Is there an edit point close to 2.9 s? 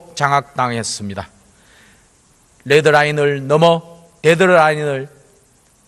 yes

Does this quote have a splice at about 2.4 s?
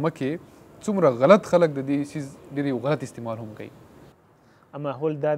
no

